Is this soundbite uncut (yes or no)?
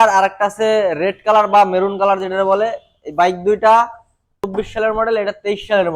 no